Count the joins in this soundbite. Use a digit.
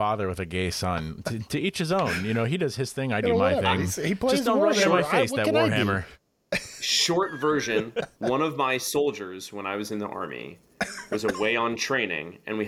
1